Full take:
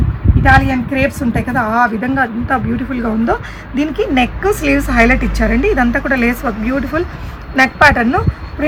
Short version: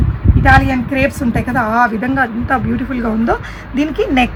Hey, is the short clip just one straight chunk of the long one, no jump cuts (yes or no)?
yes